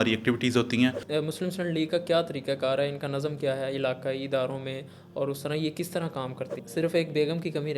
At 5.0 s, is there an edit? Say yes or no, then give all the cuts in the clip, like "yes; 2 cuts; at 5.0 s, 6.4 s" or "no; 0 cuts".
no; 2 cuts; at 1.0 s, 6.6 s